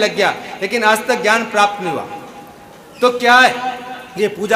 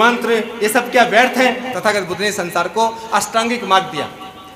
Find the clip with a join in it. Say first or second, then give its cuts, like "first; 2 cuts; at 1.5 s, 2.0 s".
second; 1 cut; at 1.7 s